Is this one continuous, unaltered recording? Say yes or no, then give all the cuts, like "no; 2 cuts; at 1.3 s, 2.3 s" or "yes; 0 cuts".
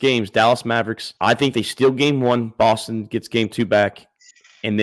no; 1 cut; at 1.0 s